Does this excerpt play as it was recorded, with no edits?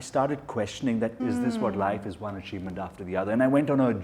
no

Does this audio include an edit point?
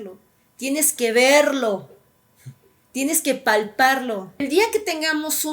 yes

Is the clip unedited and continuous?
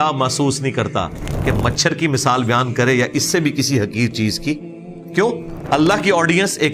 no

